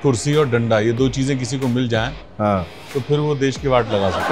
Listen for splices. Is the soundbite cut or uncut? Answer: uncut